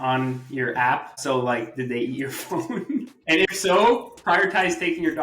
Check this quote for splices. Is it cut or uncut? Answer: cut